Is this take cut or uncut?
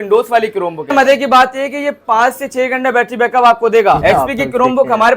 cut